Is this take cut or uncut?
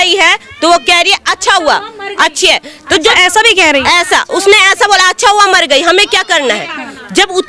uncut